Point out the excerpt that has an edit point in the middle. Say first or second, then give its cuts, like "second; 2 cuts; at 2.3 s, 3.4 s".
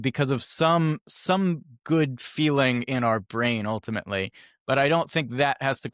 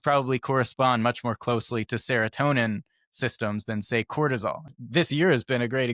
second; 1 cut; at 4.7 s